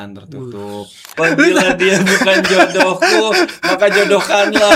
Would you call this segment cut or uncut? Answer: cut